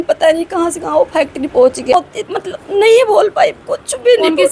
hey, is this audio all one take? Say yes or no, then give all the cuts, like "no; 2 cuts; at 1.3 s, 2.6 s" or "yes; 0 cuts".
no; 1 cut; at 1.9 s